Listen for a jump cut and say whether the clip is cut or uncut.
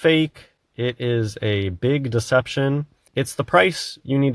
cut